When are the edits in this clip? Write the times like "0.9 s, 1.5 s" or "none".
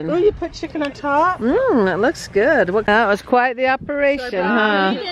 2.8 s